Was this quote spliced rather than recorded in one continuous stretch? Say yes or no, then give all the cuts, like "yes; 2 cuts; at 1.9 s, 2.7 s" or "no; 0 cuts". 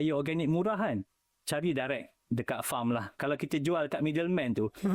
yes; 1 cut; at 3.2 s